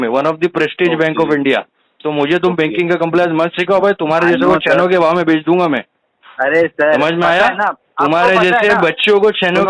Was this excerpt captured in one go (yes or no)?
yes